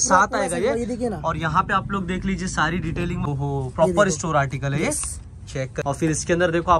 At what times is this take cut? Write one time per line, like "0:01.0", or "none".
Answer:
0:03.3
0:05.8